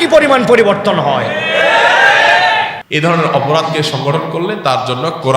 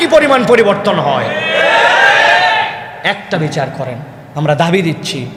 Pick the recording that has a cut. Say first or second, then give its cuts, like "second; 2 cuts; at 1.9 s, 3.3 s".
first; 1 cut; at 2.8 s